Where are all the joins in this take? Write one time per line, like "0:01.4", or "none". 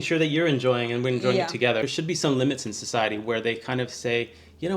0:01.9